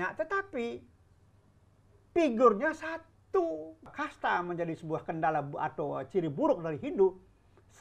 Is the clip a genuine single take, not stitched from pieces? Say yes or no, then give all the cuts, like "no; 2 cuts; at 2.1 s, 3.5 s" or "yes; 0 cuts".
no; 1 cut; at 3.9 s